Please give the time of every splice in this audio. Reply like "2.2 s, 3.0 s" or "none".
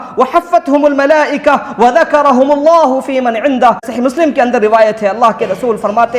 3.9 s